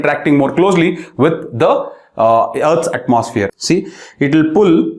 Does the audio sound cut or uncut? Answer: cut